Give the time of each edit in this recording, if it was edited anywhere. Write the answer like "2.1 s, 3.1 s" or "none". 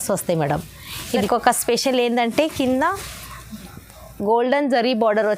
1.3 s